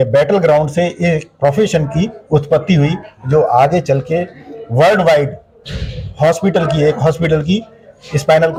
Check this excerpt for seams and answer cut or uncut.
uncut